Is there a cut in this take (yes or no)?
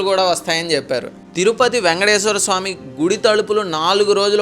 yes